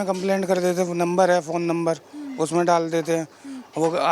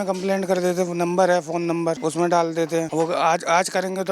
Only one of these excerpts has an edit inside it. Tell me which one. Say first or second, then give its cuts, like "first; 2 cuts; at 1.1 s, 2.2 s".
second; 2 cuts; at 2.0 s, 2.9 s